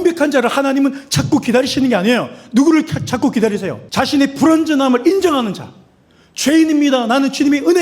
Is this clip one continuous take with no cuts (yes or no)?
no